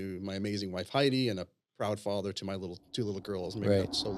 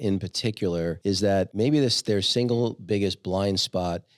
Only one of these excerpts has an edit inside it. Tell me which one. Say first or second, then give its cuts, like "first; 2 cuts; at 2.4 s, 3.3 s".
second; 1 cut; at 1.3 s